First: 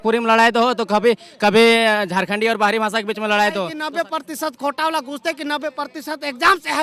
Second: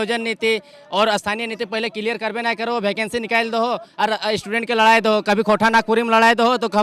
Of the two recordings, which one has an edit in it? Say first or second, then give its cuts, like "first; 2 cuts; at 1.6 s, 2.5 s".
first; 1 cut; at 3.8 s